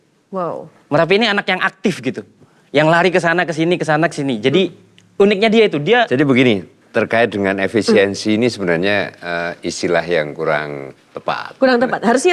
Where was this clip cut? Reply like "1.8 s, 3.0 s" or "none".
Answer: 6.1 s

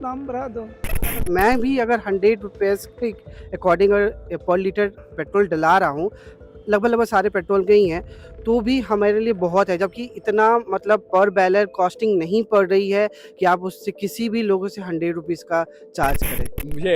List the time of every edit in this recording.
1.2 s

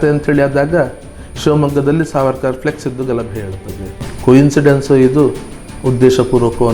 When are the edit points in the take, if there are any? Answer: 4.1 s

